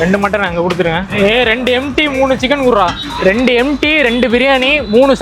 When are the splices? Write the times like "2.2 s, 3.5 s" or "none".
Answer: 1.1 s

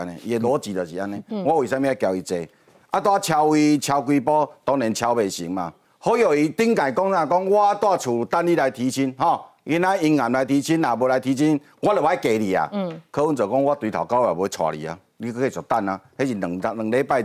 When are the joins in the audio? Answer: 5.8 s

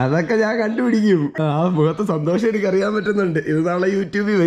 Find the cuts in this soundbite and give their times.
1.4 s

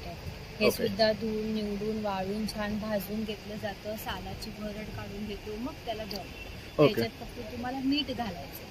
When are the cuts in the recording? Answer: none

